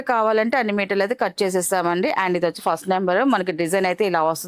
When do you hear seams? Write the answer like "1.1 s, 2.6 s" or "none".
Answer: none